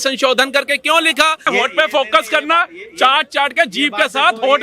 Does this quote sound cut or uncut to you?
cut